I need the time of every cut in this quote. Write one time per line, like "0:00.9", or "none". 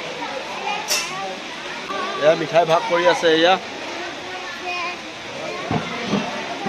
0:01.8